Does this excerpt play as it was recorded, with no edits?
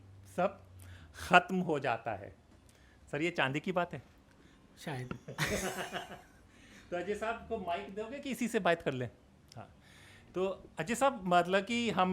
yes; 0 cuts

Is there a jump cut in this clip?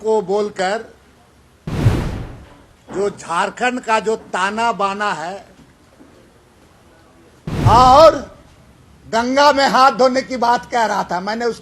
yes; 1 cut; at 7.4 s

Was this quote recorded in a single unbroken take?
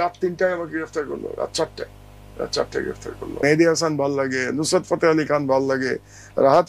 no; 1 cut; at 3.4 s

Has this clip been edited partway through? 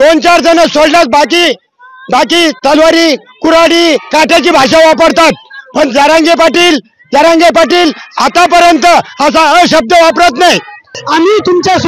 yes; 1 cut; at 10.9 s

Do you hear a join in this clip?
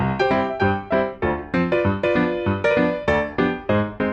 no; 0 cuts

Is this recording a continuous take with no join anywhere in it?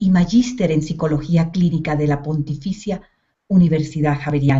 yes; 0 cuts

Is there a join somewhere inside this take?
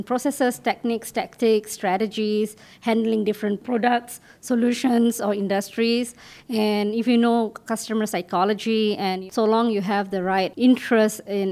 yes; 2 cuts; at 9.2 s, 10.5 s

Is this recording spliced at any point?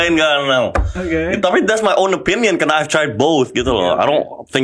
no; 0 cuts

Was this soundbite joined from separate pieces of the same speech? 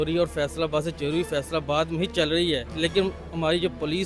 yes; 1 cut; at 2.7 s

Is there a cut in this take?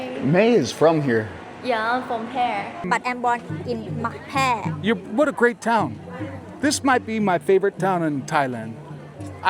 yes; 1 cut; at 2.8 s

